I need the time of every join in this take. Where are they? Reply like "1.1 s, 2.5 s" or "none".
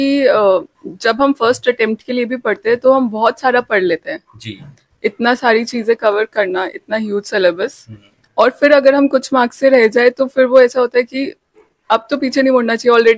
none